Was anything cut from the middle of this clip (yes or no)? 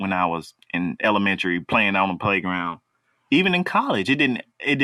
no